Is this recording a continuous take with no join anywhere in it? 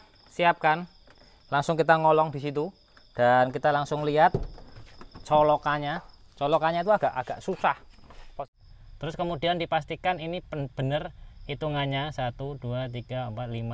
no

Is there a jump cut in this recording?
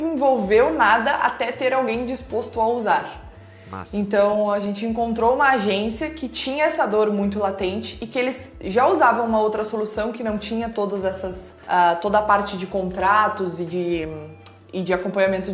no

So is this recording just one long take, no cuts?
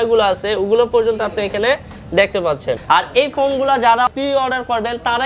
no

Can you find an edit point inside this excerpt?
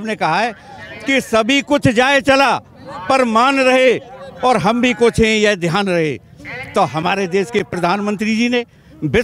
no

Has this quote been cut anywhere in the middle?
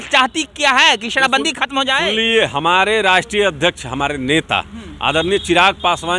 no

